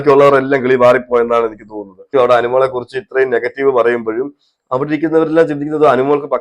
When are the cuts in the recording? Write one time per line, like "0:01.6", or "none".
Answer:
0:02.1